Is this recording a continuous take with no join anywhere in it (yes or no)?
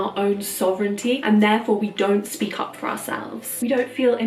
yes